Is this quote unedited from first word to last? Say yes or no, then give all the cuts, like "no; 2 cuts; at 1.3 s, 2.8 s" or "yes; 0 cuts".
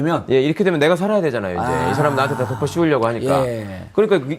no; 1 cut; at 1.0 s